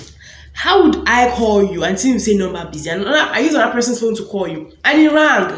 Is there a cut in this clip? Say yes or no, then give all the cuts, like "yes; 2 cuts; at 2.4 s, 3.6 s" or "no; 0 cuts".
no; 0 cuts